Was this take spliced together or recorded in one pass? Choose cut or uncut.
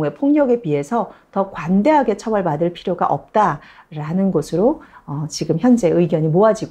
uncut